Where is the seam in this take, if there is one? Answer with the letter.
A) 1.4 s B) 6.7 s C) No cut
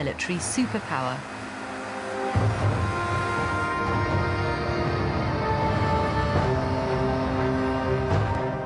B